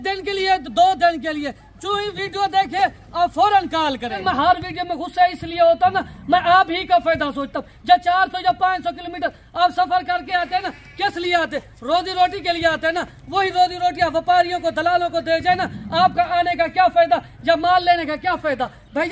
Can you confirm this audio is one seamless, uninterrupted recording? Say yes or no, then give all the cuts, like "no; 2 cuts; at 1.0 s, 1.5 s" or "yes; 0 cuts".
no; 1 cut; at 4.2 s